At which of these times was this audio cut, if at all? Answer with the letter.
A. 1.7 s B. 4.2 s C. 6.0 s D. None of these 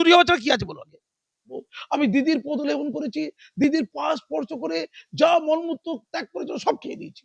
A